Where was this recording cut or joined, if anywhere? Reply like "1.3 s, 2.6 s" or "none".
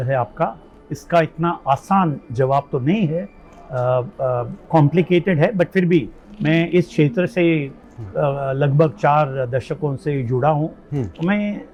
none

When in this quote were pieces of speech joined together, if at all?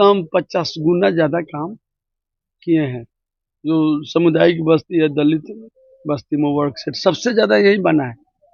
none

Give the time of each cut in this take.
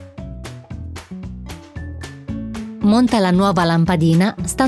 2.5 s

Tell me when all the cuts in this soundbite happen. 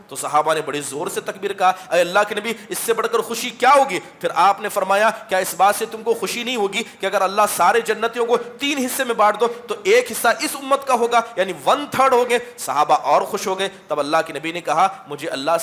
none

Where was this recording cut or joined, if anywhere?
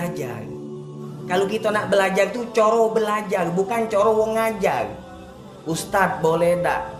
none

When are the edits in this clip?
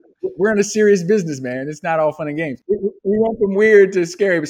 2.5 s

